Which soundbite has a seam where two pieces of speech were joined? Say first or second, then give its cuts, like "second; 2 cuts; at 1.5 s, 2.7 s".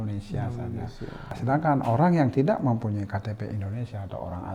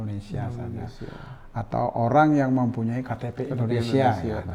first; 1 cut; at 1.3 s